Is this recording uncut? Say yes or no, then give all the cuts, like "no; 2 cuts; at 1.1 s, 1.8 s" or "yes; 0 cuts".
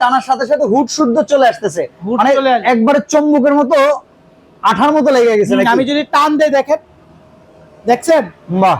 yes; 0 cuts